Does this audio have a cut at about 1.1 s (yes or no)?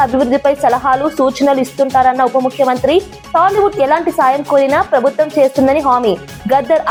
no